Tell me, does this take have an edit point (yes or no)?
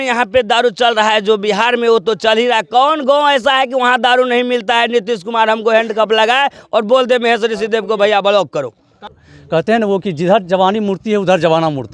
yes